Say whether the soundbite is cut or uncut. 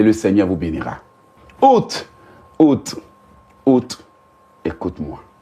cut